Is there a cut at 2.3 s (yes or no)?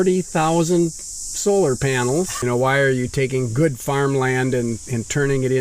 yes